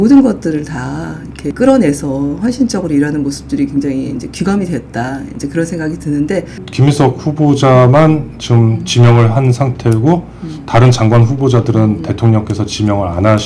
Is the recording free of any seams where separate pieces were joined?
no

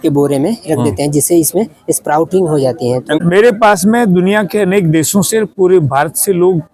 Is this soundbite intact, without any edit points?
no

